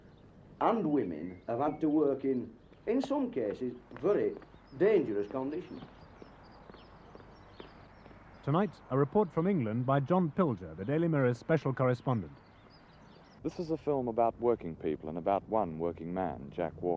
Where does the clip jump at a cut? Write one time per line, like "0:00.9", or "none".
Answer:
none